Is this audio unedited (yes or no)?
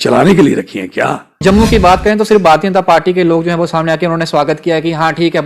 no